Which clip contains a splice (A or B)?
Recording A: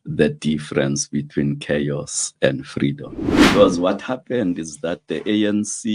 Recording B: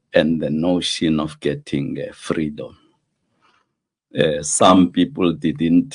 A